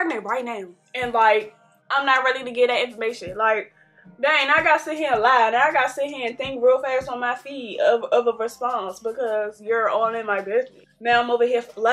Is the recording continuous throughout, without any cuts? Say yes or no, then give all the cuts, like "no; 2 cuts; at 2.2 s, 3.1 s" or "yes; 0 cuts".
yes; 0 cuts